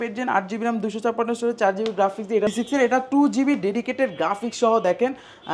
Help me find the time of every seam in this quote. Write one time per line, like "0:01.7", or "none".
0:02.5